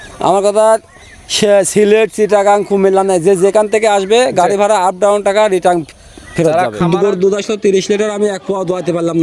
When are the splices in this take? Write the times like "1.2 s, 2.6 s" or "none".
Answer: 6.8 s

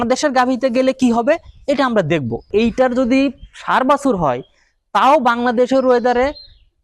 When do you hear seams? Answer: 2.5 s

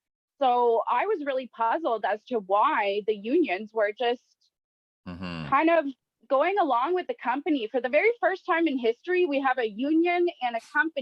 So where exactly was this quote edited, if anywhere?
none

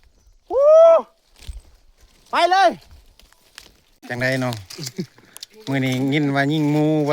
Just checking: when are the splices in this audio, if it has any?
4.0 s

